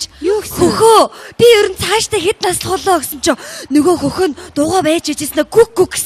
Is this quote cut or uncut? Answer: uncut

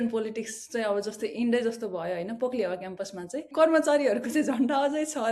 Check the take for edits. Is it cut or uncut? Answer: cut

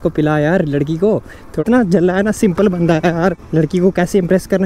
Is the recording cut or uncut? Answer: cut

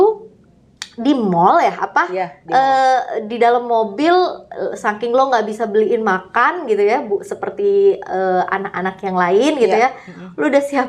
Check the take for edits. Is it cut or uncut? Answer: uncut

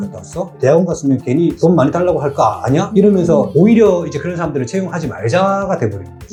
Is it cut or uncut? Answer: uncut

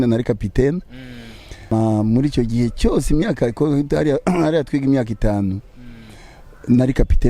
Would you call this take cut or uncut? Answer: cut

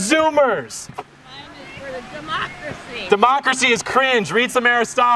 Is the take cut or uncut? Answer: cut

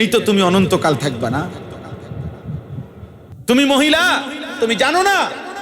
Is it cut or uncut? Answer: cut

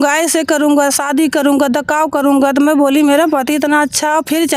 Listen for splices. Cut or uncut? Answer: uncut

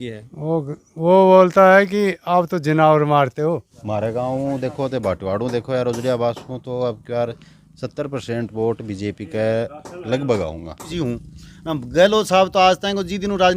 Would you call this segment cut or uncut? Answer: cut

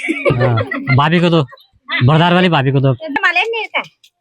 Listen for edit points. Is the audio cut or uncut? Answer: cut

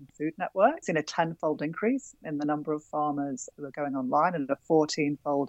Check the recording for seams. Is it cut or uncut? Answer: cut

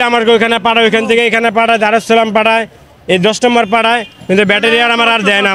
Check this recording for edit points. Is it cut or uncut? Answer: uncut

